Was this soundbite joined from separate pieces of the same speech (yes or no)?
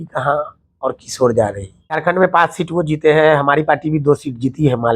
yes